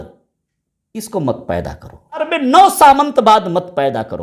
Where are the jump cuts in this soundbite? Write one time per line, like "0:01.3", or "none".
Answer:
0:02.3